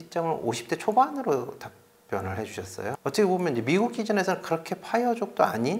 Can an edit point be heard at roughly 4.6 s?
no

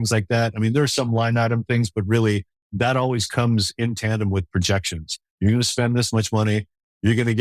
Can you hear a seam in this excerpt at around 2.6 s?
yes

